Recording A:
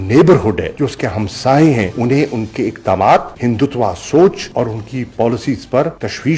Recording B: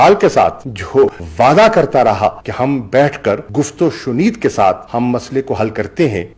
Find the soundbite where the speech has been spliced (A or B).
B